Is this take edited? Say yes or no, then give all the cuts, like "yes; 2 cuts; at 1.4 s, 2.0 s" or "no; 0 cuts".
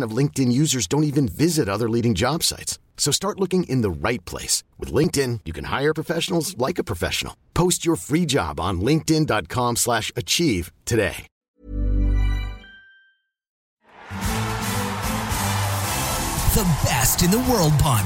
yes; 2 cuts; at 11.3 s, 13.6 s